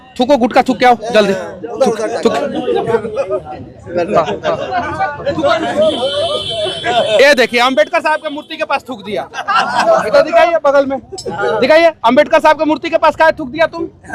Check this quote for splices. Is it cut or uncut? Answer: uncut